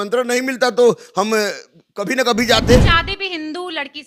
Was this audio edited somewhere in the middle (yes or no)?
yes